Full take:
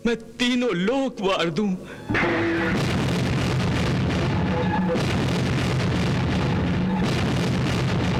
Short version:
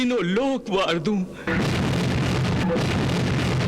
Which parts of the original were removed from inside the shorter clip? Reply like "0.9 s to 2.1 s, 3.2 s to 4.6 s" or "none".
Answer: 2.0 s to 2.6 s, 3.8 s to 4.8 s